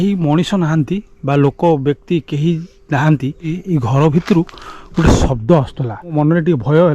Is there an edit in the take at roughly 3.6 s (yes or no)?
yes